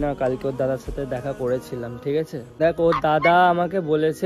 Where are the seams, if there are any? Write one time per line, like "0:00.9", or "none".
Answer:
0:02.6